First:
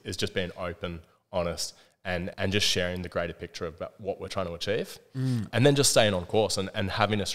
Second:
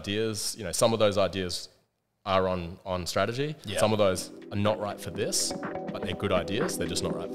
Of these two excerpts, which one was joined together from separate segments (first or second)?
first